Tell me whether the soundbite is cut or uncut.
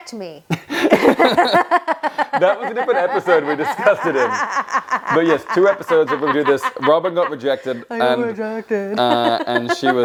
uncut